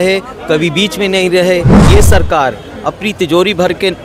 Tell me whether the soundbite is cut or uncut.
cut